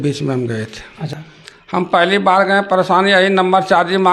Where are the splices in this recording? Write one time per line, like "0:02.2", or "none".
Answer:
0:01.1